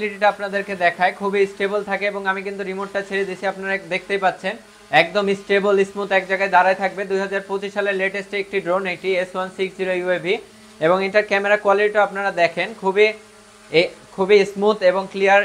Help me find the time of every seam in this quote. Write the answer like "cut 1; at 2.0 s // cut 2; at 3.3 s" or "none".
none